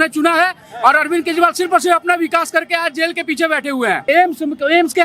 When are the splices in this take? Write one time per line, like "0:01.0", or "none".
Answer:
0:04.0